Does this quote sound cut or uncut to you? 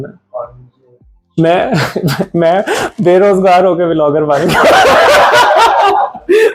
uncut